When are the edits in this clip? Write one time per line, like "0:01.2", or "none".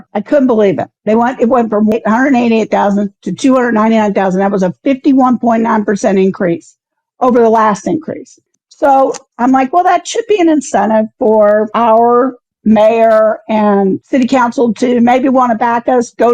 0:01.9
0:08.5